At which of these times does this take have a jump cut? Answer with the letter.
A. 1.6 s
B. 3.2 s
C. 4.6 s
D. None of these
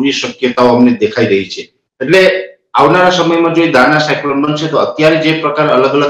D